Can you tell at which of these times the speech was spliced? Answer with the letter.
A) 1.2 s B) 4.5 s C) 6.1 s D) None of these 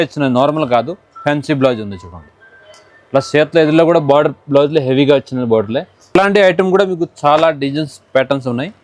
C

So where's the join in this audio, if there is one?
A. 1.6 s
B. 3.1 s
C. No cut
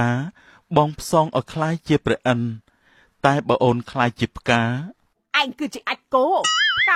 C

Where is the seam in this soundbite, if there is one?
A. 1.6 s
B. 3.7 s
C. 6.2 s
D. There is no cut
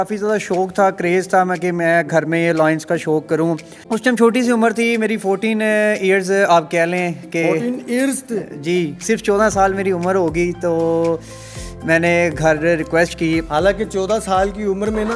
B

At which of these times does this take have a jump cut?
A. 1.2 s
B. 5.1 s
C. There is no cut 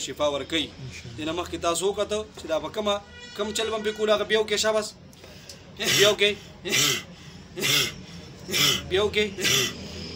C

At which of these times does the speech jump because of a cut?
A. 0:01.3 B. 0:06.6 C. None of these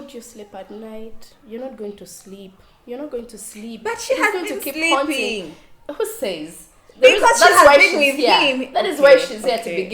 A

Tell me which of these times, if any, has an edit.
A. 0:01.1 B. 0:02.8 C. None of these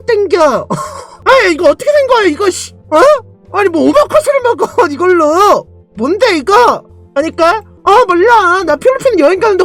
A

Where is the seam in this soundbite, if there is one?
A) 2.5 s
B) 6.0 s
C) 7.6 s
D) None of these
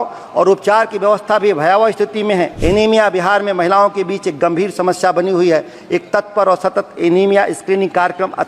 A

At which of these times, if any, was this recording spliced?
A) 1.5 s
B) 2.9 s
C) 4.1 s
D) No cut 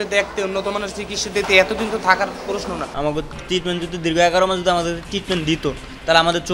B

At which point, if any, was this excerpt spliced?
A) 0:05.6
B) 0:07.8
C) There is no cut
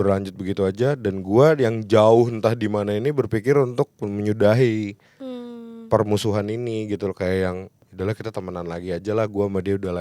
B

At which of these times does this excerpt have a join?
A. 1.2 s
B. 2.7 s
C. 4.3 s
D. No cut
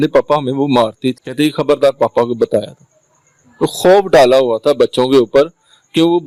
D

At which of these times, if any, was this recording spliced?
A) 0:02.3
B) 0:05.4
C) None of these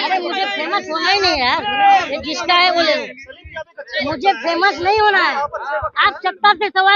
C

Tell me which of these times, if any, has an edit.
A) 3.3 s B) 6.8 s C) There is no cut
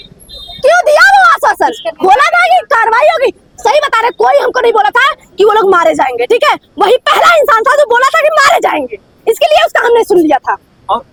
C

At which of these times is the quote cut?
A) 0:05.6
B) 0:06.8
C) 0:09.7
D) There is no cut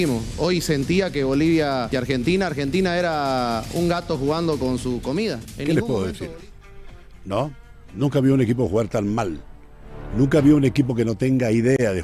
A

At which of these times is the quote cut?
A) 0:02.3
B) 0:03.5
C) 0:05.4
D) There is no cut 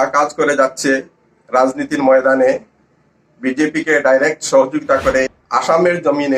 C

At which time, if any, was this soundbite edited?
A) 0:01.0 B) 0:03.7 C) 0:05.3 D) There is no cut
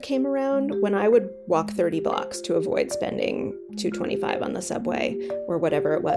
D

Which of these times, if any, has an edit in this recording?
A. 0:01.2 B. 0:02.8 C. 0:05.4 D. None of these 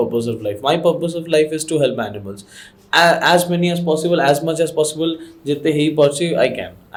D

